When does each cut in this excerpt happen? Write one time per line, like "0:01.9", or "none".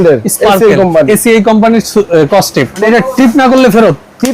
0:02.8

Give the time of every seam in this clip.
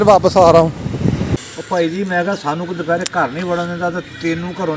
0:01.3

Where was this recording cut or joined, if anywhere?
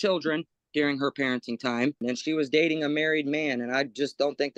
0:02.0

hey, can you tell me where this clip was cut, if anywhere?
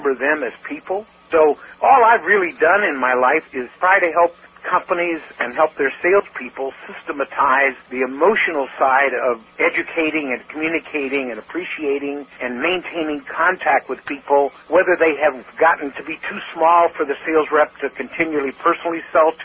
0:01.1
0:03.7
0:04.5
0:07.8
0:09.5
0:12.4
0:14.6
0:15.5

